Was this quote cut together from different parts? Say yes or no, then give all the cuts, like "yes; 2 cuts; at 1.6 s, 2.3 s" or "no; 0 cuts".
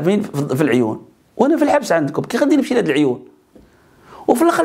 no; 0 cuts